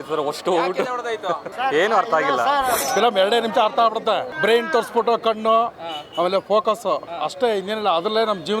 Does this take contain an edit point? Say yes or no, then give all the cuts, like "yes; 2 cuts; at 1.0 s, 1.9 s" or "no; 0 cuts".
yes; 3 cuts; at 1.5 s, 2.8 s, 4.3 s